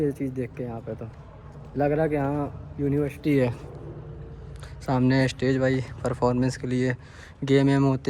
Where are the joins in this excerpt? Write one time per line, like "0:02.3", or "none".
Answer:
none